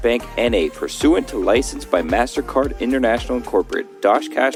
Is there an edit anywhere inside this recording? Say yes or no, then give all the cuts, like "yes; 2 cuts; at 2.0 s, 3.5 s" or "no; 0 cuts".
no; 0 cuts